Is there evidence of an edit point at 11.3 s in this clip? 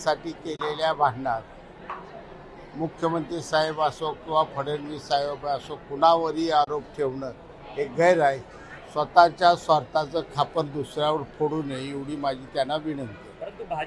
no; 0 cuts

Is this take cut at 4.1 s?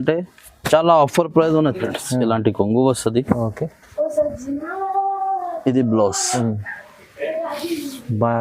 no; 1 cut; at 1.8 s

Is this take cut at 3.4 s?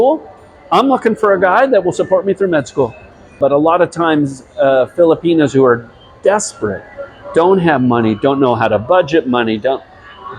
yes; 1 cut; at 3.4 s

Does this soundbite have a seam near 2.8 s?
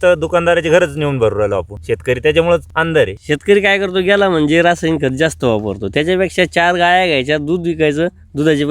yes; 2 cuts; at 1.7 s, 2.8 s

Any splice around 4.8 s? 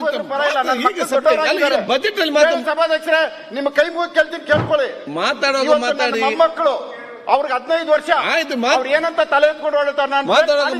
no; 0 cuts

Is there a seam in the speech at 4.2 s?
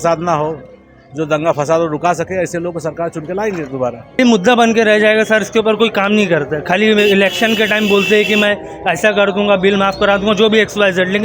yes; 1 cut; at 4.2 s

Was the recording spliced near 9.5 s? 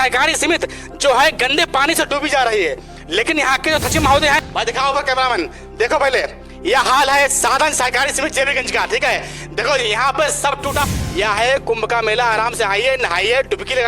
no; 2 cuts; at 4.4 s, 10.9 s

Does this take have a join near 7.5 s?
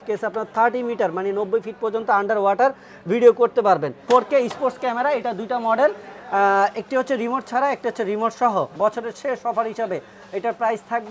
no; 2 cuts; at 3.9 s, 8.7 s

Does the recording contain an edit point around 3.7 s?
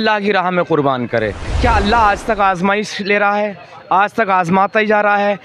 no; 1 cut; at 1.4 s

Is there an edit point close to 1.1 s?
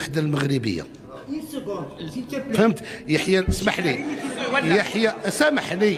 no; 0 cuts

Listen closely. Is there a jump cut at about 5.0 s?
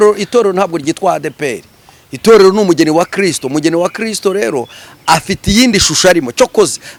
no; 0 cuts

